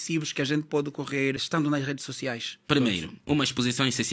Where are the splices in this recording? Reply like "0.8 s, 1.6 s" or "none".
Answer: 2.6 s